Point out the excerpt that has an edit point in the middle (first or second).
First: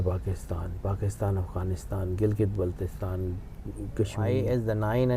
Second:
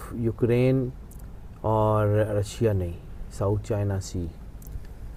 first